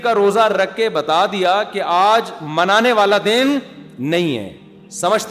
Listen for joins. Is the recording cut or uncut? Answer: uncut